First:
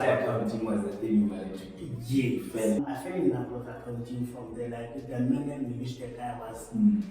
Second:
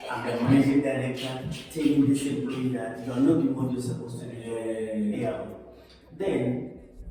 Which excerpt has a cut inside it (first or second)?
first